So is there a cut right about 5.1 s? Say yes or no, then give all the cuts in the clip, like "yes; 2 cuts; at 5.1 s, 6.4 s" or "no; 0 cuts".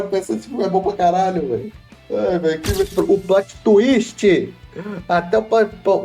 no; 1 cut; at 2.8 s